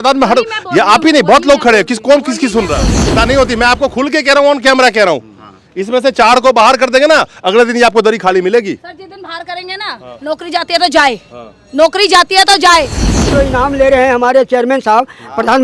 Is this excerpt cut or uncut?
cut